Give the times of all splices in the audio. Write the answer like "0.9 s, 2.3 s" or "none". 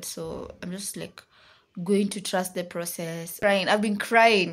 3.3 s